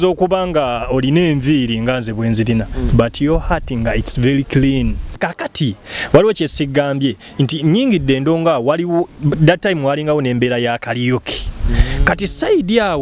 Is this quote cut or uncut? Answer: cut